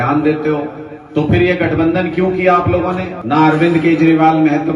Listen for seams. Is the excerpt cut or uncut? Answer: cut